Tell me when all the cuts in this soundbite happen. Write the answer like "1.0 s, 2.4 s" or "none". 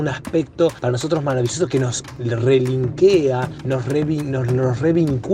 0.8 s, 2.1 s, 3.5 s

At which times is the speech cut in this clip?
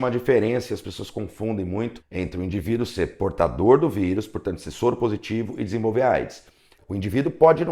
2.0 s, 6.8 s

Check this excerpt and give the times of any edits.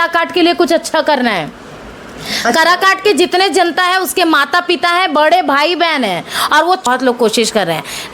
6.9 s

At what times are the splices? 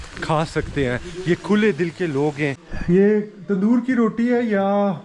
2.7 s

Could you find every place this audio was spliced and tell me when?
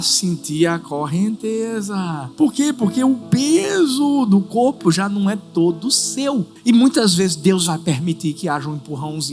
2.2 s, 6.5 s

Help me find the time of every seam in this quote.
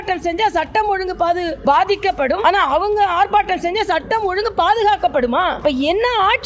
1.5 s, 5.6 s

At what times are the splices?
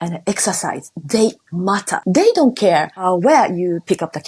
1.9 s, 3.0 s

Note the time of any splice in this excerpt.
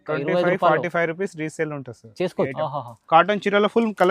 2.5 s

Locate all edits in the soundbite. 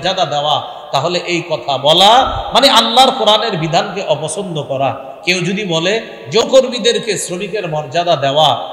6.4 s

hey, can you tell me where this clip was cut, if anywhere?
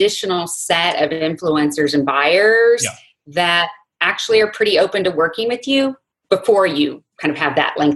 6.1 s, 7.1 s

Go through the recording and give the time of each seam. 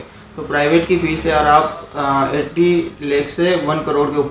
none

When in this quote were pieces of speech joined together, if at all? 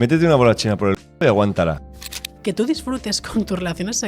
1.8 s

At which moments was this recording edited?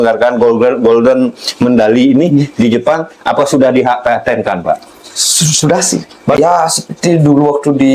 6.4 s

